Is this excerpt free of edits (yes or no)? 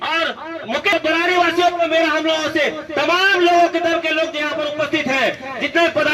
yes